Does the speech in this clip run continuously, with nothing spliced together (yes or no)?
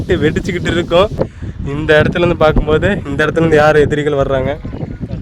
no